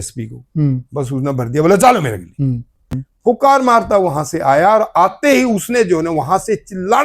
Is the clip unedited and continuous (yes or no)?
no